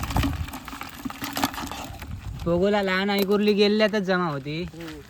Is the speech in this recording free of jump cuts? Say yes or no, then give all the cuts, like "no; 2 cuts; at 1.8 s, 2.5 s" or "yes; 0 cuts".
yes; 0 cuts